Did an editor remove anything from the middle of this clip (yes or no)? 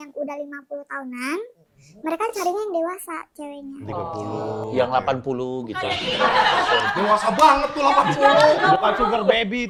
no